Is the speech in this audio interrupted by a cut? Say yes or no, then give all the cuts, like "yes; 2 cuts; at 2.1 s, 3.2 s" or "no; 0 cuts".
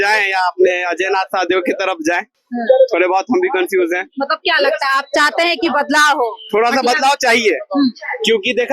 no; 0 cuts